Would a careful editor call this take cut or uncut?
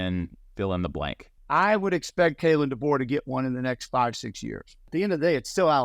cut